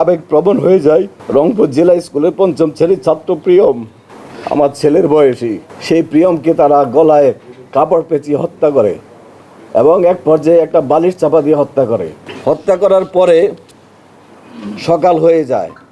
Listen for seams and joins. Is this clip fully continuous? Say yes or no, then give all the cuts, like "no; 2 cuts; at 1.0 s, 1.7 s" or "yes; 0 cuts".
yes; 0 cuts